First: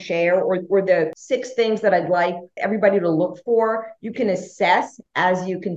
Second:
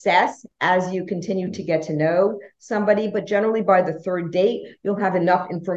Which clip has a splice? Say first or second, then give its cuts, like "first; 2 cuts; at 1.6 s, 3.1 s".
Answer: first; 2 cuts; at 1.2 s, 2.5 s